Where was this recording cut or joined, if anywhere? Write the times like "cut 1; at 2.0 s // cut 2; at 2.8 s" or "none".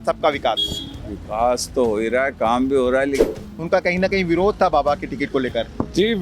cut 1; at 3.2 s